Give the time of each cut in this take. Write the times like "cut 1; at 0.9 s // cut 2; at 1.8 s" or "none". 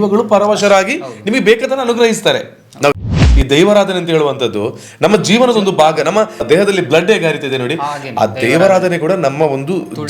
cut 1; at 3.0 s // cut 2; at 6.4 s